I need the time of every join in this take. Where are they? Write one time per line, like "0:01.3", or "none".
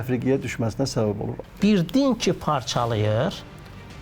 0:01.3